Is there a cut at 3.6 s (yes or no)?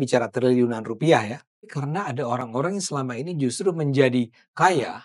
no